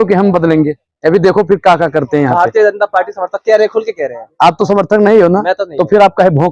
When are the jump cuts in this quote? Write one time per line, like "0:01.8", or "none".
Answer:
none